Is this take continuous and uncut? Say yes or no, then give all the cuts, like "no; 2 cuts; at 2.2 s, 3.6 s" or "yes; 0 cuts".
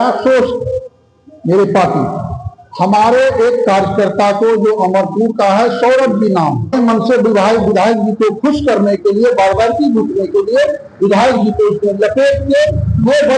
no; 1 cut; at 6.7 s